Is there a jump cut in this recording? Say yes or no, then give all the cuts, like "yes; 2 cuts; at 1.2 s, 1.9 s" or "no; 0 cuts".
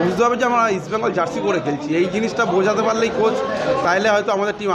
no; 0 cuts